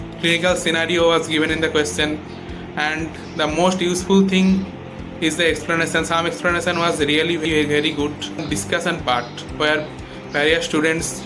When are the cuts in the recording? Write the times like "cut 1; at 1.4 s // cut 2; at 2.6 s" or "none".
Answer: cut 1; at 7.4 s // cut 2; at 8.4 s